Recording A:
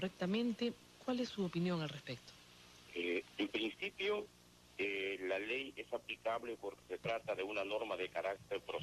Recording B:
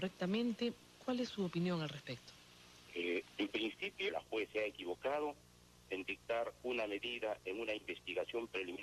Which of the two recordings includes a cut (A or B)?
A